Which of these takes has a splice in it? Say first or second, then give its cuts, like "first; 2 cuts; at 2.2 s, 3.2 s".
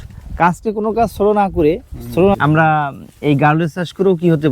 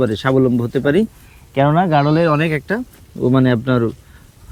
first; 1 cut; at 2.3 s